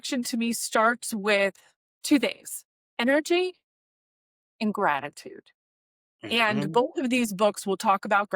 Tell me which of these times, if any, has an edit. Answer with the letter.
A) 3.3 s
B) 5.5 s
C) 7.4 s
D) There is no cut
D